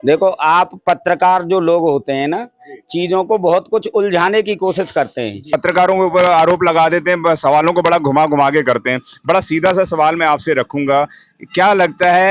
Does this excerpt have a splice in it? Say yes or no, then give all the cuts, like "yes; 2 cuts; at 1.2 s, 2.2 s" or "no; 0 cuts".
yes; 1 cut; at 5.5 s